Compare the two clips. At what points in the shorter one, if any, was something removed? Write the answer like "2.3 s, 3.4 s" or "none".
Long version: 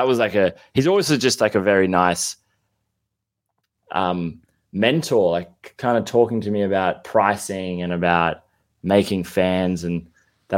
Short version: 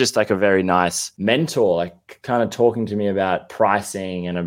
1.1 s

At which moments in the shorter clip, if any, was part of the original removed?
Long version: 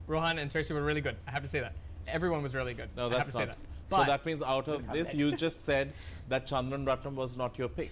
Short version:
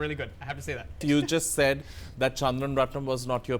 1.0 s

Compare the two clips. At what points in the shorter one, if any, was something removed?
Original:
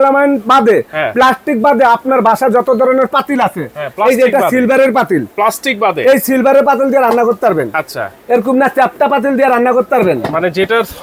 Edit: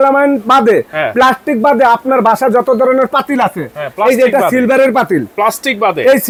none

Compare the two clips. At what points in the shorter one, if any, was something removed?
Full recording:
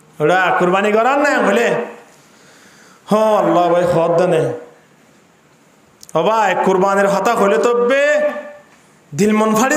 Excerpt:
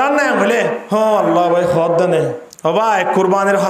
0.8 s, 2.5 s

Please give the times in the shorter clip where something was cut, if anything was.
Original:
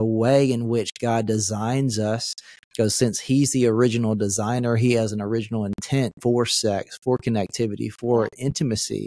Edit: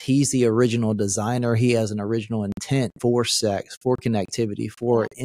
none

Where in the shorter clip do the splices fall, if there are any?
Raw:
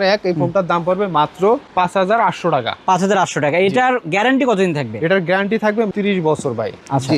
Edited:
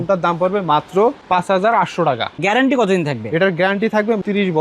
2.3 s

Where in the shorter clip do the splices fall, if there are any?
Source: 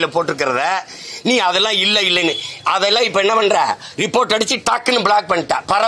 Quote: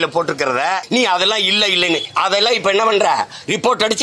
0.8 s, 2.1 s

